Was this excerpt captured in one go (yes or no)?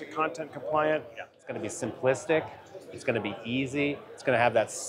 no